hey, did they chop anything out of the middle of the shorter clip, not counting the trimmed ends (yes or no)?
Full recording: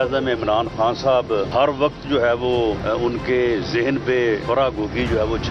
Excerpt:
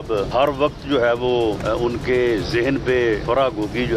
no